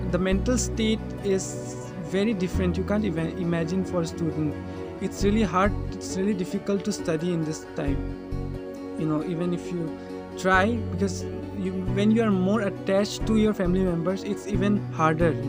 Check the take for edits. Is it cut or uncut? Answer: uncut